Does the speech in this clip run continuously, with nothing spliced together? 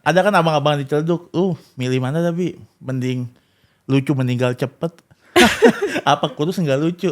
yes; 0 cuts

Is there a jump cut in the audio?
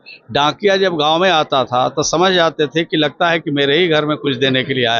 no; 0 cuts

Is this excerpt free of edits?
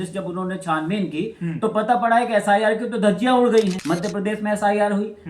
no; 1 cut; at 3.8 s

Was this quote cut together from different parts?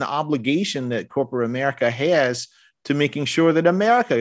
no; 0 cuts

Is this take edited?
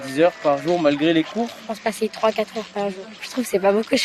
yes; 2 cuts; at 1.6 s, 3.2 s

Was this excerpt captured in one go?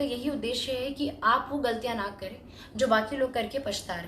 yes; 0 cuts

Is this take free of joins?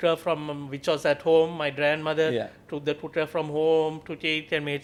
yes; 0 cuts

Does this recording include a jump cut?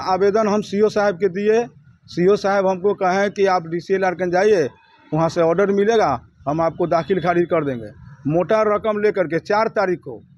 no; 0 cuts

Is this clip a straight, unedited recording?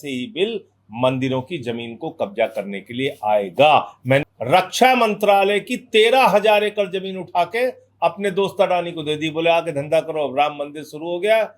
no; 1 cut; at 4.2 s

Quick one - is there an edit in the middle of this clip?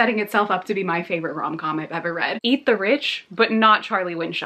yes; 1 cut; at 2.3 s

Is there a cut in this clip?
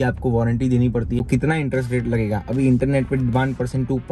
yes; 1 cut; at 1.2 s

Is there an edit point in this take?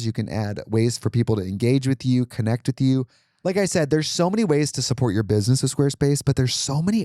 yes; 1 cut; at 3.2 s

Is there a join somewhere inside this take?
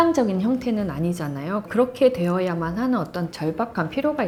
no; 0 cuts

